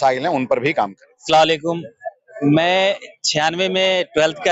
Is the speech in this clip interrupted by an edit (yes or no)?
no